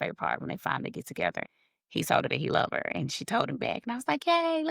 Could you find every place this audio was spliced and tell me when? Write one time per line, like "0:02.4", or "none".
0:01.4